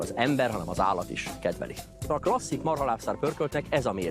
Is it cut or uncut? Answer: cut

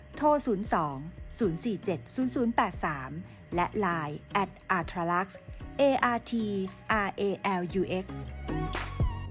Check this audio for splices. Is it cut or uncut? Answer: uncut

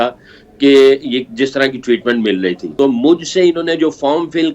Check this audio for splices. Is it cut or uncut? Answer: cut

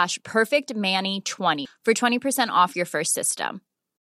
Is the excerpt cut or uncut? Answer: cut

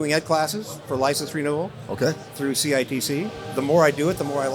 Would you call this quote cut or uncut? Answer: cut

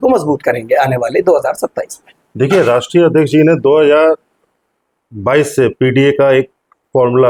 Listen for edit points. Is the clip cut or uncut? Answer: uncut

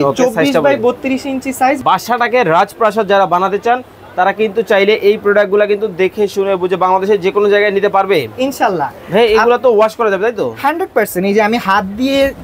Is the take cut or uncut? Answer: cut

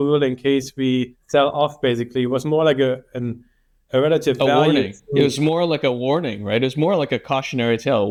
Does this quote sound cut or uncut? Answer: uncut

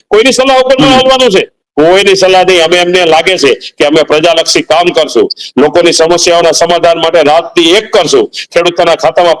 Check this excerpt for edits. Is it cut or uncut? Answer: uncut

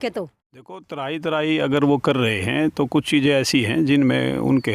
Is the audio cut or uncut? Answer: cut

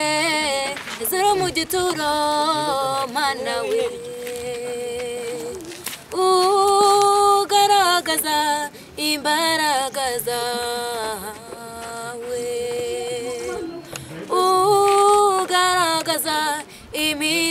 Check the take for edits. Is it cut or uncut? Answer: uncut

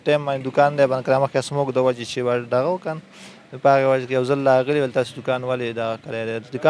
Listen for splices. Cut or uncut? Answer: uncut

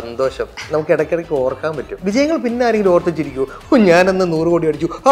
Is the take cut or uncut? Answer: cut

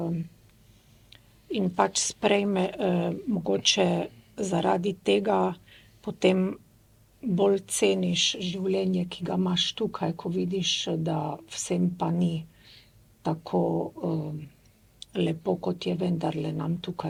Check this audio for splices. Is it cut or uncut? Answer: uncut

